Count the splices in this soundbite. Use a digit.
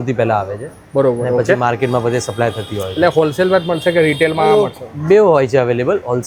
0